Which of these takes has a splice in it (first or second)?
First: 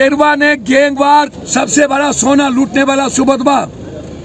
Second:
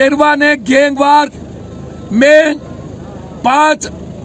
first